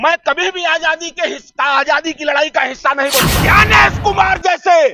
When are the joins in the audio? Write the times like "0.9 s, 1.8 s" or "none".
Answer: 3.3 s